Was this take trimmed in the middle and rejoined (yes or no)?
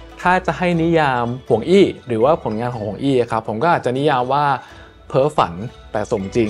yes